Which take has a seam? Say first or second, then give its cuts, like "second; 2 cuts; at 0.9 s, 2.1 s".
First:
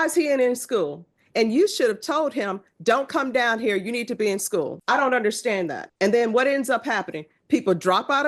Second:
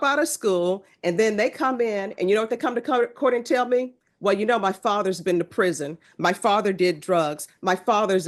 first; 2 cuts; at 4.8 s, 5.8 s